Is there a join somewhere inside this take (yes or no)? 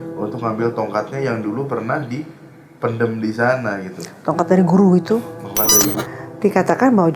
yes